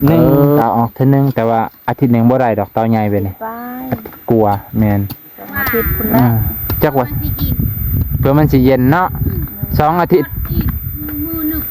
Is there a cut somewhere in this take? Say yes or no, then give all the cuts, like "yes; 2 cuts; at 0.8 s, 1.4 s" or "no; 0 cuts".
no; 0 cuts